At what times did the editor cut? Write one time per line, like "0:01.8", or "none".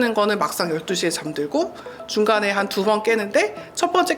none